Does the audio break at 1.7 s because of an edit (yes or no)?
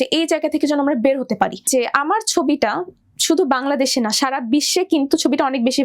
yes